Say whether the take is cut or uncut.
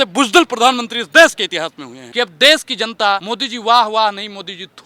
cut